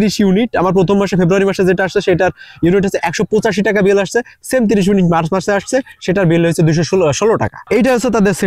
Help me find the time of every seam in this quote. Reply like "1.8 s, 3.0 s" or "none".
7.5 s

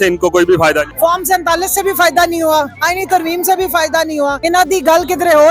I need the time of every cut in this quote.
0.9 s, 2.8 s, 4.4 s

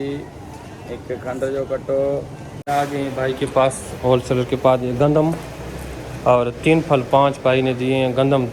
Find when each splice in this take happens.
2.5 s

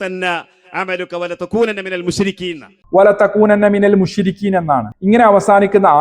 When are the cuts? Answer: 2.8 s

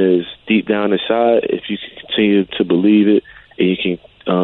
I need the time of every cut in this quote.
none

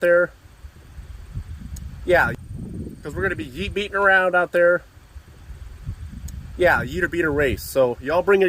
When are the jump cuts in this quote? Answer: 2.4 s

